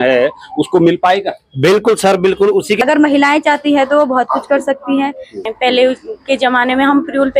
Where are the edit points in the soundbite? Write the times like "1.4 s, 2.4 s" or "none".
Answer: 2.8 s, 5.3 s